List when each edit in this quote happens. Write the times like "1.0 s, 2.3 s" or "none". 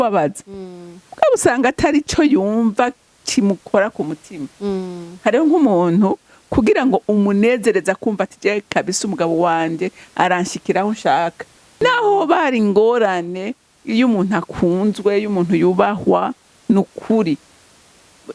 11.8 s